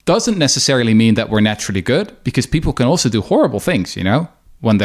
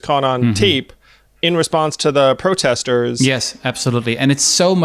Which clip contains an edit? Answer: second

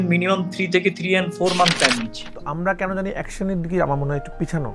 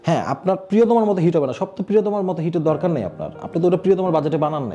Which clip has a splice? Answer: first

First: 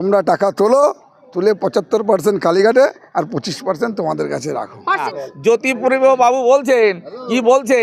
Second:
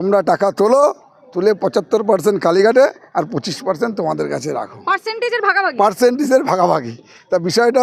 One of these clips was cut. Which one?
first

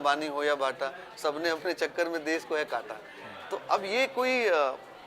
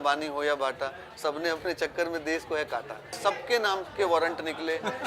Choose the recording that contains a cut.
second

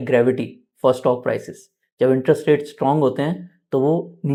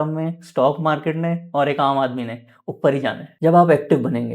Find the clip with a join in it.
second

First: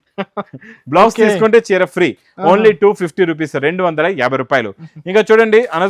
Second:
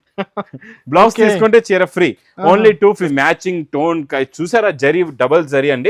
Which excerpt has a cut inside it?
second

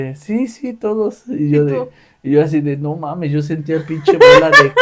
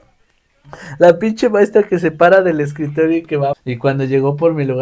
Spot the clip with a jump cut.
second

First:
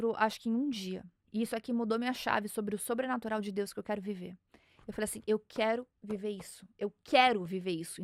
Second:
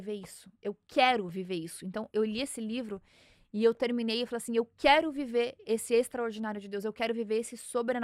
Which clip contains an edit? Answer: first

